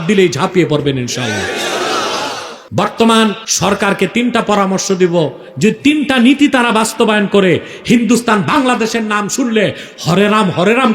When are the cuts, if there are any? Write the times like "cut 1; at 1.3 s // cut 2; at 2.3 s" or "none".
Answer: cut 1; at 2.5 s // cut 2; at 3.5 s